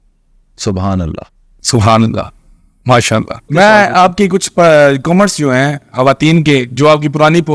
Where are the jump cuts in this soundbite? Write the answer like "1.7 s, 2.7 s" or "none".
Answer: 3.4 s